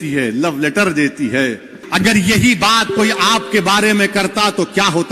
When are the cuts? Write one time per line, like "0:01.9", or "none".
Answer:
0:01.8